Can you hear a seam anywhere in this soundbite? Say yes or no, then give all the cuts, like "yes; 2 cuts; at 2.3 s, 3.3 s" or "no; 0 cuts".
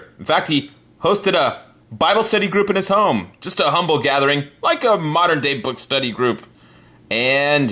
no; 0 cuts